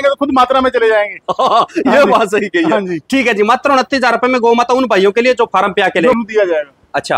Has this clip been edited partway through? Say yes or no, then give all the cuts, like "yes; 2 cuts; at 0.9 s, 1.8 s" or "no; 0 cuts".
yes; 1 cut; at 6.1 s